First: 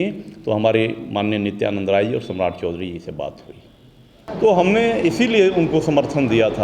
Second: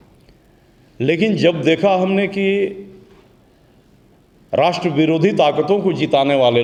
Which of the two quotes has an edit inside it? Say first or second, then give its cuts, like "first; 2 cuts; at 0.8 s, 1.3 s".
first; 1 cut; at 4.3 s